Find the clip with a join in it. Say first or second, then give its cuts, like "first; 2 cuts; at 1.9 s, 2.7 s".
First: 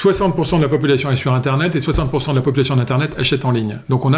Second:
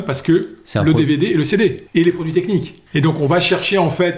second; 2 cuts; at 1.8 s, 2.8 s